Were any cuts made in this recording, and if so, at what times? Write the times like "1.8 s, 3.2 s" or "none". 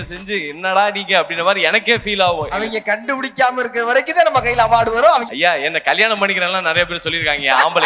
2.6 s, 5.2 s